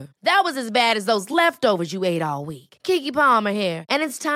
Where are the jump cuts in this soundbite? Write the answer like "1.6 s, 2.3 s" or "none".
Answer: none